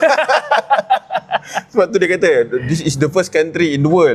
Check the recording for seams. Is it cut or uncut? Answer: uncut